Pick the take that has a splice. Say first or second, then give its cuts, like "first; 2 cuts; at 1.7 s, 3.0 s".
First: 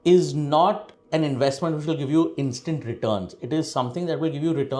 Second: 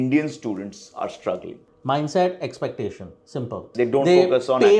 second; 2 cuts; at 1.7 s, 3.7 s